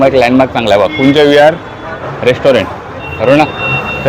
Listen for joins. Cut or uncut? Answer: uncut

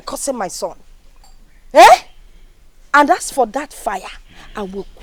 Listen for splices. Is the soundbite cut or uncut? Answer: uncut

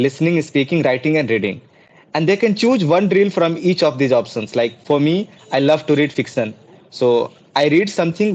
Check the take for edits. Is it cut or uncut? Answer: uncut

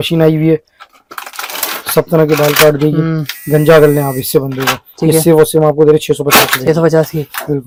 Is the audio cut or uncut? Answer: uncut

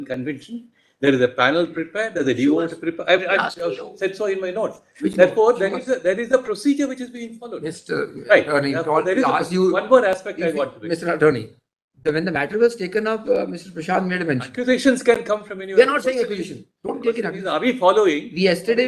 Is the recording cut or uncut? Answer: uncut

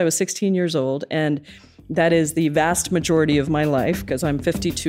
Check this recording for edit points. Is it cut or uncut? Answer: uncut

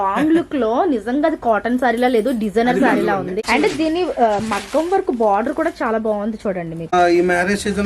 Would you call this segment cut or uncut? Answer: cut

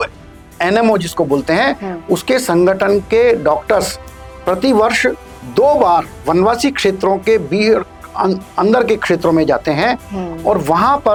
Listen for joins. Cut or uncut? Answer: uncut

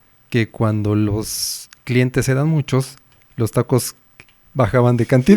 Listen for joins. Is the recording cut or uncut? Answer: uncut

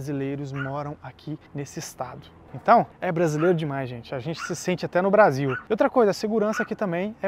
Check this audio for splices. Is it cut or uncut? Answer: cut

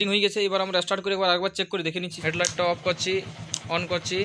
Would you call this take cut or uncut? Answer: cut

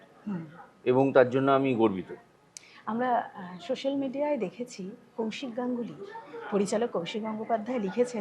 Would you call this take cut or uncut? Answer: uncut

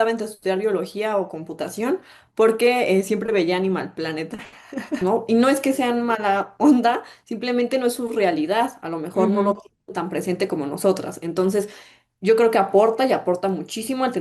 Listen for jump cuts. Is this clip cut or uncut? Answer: cut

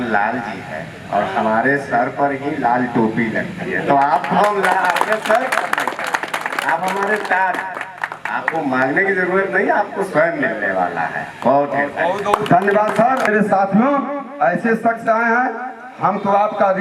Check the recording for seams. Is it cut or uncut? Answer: uncut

